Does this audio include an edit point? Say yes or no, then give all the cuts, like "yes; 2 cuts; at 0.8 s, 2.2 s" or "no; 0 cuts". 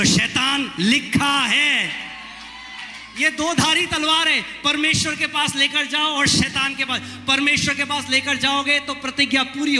no; 0 cuts